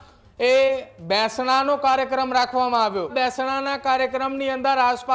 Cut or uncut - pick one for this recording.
cut